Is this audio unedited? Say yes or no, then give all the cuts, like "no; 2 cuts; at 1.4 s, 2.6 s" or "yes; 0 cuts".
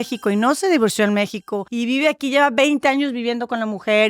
no; 1 cut; at 1.6 s